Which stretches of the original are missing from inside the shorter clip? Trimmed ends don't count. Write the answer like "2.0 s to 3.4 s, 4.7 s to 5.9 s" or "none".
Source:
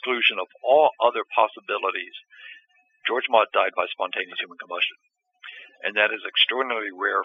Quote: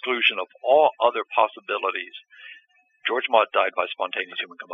none